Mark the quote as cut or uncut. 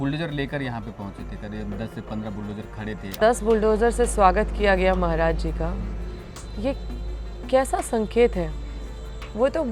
cut